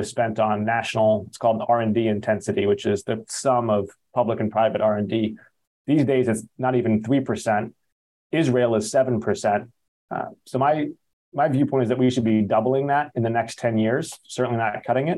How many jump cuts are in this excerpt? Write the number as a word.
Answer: zero